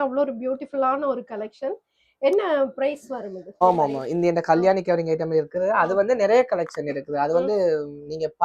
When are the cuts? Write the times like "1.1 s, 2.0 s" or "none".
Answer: 3.5 s